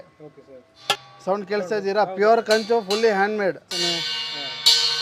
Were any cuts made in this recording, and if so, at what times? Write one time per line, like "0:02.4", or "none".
0:00.9
0:03.7